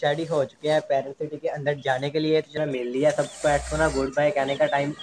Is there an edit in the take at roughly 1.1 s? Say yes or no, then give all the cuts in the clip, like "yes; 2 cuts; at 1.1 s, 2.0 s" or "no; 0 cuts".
no; 1 cut; at 2.5 s